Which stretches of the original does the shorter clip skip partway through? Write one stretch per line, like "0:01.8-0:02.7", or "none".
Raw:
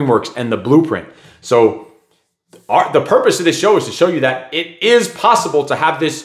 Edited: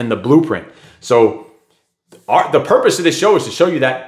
none